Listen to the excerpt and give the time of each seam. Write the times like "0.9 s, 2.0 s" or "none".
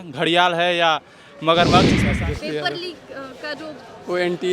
2.0 s